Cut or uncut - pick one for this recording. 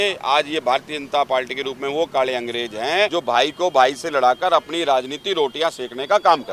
cut